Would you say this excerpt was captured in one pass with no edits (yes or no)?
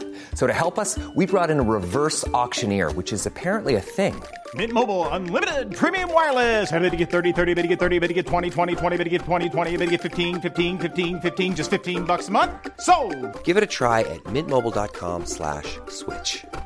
yes